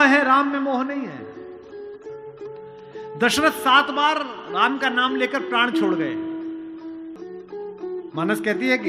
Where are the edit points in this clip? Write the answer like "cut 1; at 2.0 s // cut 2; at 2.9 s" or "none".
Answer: cut 1; at 7.1 s